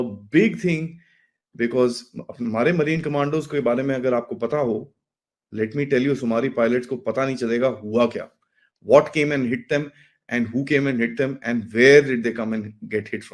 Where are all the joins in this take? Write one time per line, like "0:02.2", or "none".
none